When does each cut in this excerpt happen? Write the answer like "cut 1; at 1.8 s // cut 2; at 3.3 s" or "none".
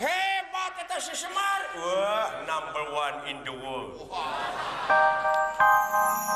cut 1; at 4.9 s